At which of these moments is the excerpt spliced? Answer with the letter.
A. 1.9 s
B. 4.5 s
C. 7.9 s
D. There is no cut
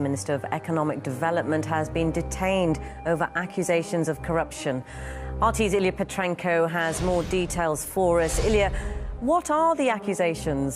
C